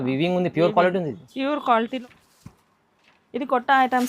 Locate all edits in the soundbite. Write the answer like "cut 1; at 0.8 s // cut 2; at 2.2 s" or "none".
cut 1; at 2.0 s